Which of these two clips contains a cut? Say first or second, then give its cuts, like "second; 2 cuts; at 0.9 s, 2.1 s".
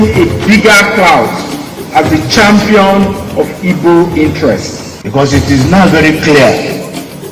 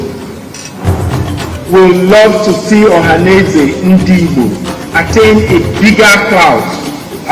first; 1 cut; at 6.2 s